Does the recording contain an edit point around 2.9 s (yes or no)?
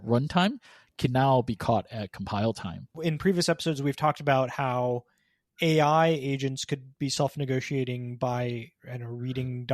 yes